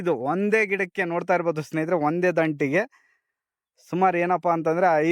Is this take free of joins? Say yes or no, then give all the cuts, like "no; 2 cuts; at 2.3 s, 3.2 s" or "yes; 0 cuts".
yes; 0 cuts